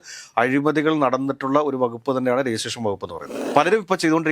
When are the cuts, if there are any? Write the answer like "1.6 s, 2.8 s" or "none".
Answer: 3.4 s